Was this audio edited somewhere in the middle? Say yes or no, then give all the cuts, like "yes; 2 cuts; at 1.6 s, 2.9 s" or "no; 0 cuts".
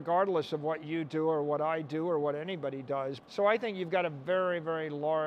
yes; 1 cut; at 3.2 s